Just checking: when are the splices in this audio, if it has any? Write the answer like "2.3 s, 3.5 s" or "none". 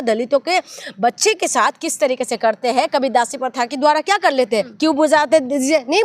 4.7 s